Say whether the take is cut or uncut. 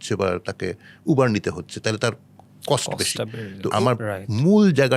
cut